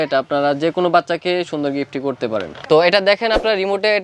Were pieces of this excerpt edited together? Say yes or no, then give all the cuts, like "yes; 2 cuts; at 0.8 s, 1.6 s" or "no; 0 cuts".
yes; 1 cut; at 2.5 s